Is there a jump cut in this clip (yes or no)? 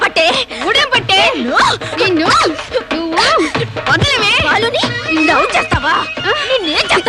no